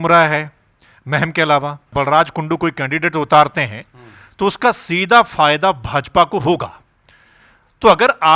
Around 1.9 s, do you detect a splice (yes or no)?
yes